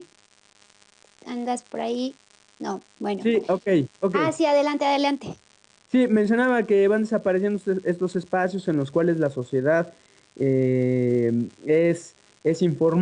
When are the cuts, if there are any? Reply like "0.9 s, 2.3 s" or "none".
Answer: 9.7 s